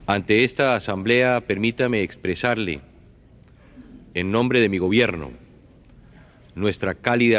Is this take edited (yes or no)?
no